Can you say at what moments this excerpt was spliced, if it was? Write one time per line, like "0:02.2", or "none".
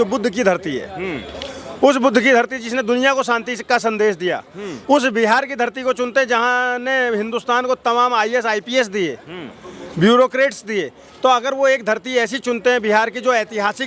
none